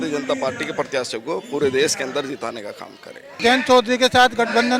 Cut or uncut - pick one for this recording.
cut